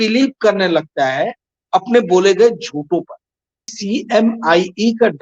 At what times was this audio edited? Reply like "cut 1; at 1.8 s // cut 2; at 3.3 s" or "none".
cut 1; at 3.7 s